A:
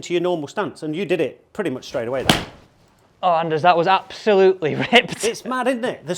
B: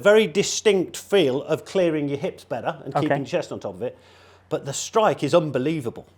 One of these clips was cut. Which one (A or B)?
A